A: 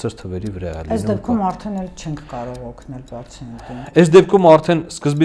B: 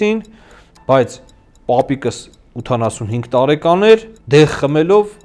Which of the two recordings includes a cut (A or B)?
B